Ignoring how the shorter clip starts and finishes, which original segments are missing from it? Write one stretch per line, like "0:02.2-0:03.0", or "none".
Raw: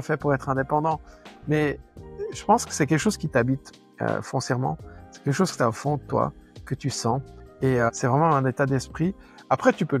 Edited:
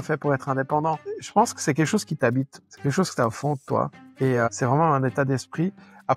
0:01.1-0:02.3
0:03.8-0:05.1
0:06.4-0:07.4

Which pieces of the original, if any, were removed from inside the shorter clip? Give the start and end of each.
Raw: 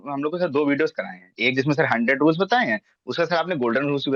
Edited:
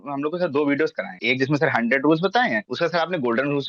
0:01.1-0:01.3
0:02.8-0:03.0

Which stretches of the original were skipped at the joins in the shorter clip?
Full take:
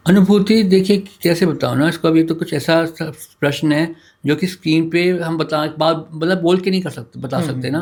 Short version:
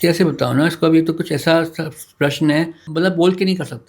0:04.0-0:06.1

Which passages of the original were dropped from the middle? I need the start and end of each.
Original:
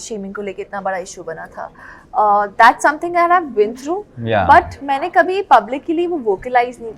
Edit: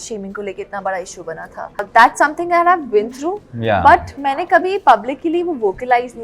0:01.9-0:02.5

